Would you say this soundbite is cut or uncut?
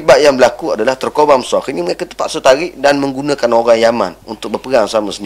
cut